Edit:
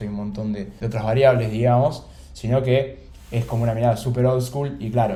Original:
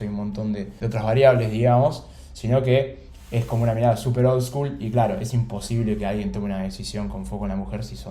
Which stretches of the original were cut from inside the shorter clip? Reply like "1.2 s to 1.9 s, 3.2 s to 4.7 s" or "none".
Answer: none